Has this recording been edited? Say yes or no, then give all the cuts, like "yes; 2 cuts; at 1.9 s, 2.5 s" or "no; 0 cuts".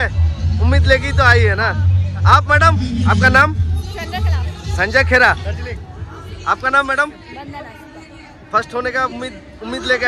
no; 0 cuts